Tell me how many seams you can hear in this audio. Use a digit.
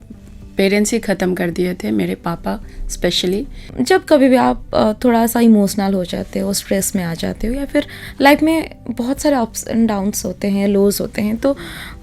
1